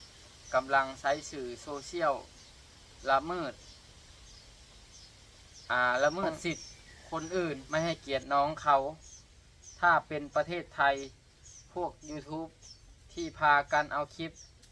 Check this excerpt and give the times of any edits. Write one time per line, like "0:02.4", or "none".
0:07.6